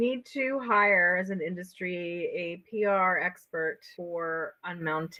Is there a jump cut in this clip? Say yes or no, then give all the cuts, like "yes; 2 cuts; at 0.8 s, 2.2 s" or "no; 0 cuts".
no; 0 cuts